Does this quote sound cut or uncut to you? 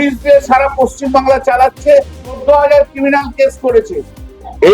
cut